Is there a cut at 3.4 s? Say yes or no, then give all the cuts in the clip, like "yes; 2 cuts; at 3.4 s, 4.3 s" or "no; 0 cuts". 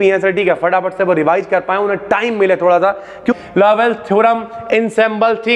yes; 1 cut; at 3.4 s